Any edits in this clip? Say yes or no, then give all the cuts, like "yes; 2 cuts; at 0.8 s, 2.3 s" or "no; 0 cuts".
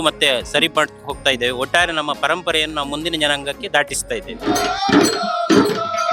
no; 0 cuts